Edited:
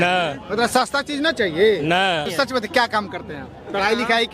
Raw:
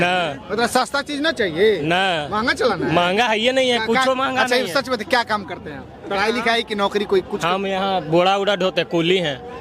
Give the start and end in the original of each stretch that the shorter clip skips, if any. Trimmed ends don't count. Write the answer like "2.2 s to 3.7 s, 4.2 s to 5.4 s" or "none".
2.3 s to 4.7 s